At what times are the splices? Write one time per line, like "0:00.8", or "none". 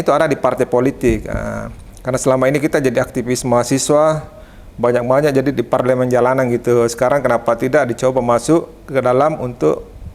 none